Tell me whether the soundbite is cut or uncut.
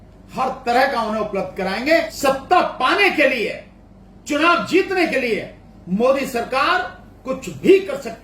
cut